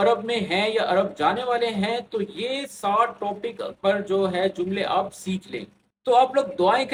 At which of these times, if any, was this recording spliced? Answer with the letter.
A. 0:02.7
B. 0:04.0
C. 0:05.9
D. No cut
D